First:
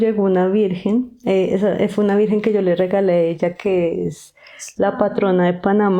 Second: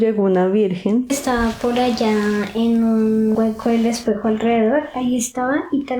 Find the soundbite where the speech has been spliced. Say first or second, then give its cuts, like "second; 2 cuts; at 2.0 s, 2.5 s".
second; 2 cuts; at 1.2 s, 3.3 s